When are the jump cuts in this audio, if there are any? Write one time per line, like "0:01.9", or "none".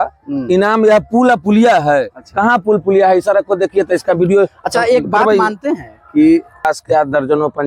0:06.7